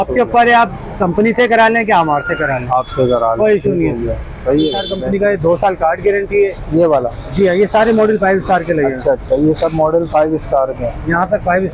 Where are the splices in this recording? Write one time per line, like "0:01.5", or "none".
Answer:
0:04.9